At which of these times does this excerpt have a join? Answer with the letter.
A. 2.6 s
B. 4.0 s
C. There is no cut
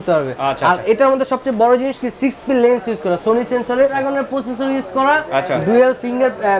B